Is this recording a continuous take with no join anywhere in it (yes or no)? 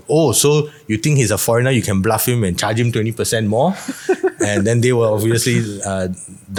yes